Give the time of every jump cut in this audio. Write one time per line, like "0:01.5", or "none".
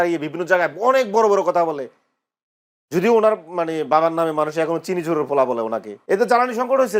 0:05.9